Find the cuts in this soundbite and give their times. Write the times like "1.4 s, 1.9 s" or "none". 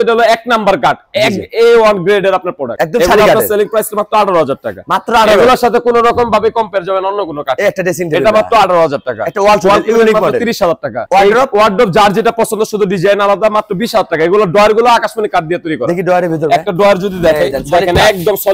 none

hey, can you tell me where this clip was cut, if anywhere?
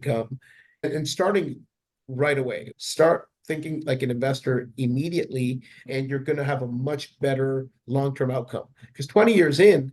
0.9 s, 2.7 s

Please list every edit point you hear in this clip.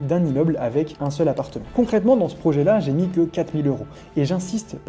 1.7 s

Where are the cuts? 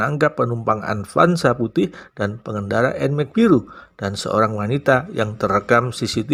none

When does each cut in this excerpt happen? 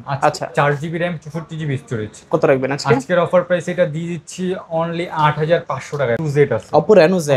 6.2 s

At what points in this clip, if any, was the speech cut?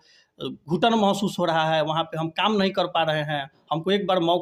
none

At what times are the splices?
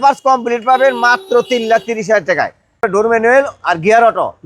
2.8 s

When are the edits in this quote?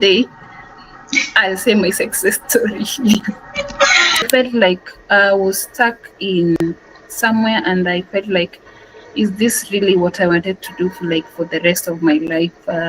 4.3 s

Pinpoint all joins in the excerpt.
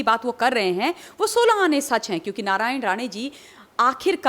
none

